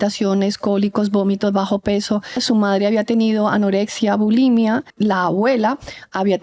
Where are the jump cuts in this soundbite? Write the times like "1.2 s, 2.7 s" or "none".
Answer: 2.4 s, 4.9 s